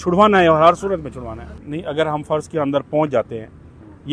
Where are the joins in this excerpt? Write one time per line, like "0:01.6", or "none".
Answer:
0:01.6